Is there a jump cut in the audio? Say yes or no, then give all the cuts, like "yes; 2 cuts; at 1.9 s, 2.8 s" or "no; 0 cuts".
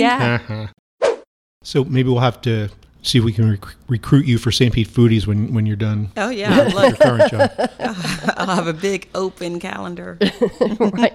yes; 1 cut; at 1.0 s